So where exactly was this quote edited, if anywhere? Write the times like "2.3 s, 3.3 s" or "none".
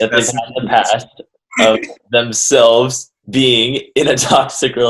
none